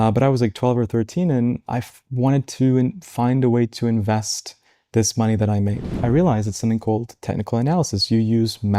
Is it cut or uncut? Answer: cut